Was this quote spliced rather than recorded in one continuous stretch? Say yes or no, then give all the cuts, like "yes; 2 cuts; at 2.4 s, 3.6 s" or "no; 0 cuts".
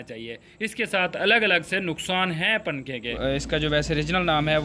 yes; 1 cut; at 3.1 s